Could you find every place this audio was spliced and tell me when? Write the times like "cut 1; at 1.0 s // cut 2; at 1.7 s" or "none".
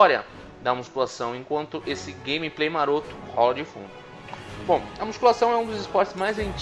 cut 1; at 1.7 s